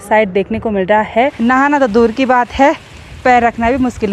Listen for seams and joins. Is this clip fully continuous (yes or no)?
no